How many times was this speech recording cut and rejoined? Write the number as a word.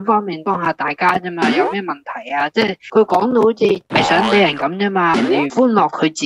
zero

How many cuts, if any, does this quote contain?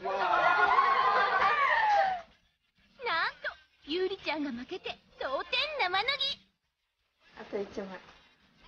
zero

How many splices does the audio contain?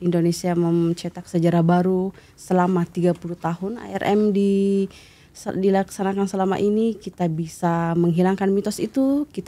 zero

